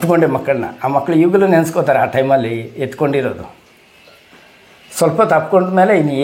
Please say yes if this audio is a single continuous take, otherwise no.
yes